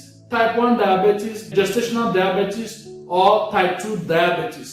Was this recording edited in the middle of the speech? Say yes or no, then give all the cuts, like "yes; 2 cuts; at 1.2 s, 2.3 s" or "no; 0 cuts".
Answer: yes; 1 cut; at 1.5 s